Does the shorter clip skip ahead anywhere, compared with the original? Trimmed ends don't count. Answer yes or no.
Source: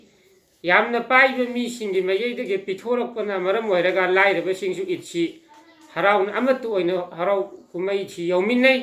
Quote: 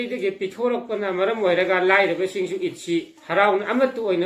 yes